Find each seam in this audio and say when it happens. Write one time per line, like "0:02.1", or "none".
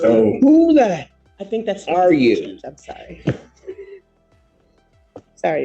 none